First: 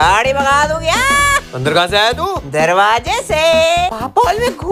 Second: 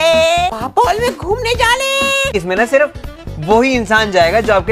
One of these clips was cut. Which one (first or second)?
second